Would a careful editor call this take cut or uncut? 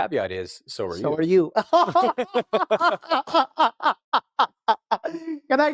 uncut